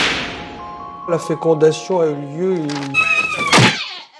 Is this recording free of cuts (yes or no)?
yes